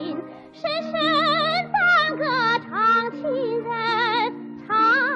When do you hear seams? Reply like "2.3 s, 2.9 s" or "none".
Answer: none